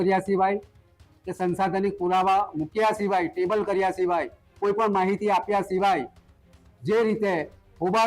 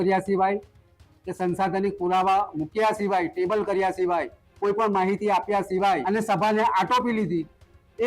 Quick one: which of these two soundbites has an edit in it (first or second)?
second